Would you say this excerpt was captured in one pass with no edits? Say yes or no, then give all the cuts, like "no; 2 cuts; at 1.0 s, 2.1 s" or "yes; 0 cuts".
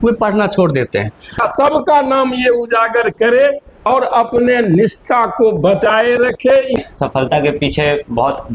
no; 2 cuts; at 1.4 s, 6.8 s